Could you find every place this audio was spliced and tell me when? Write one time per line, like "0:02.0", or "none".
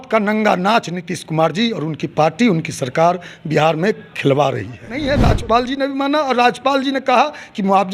0:05.1